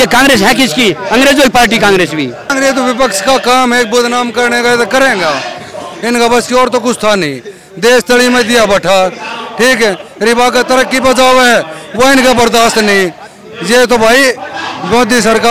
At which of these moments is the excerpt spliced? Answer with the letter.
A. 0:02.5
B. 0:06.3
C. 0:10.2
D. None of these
A